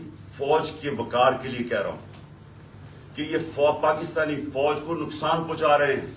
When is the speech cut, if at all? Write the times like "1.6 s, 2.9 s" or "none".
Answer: none